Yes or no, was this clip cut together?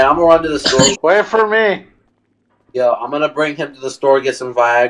yes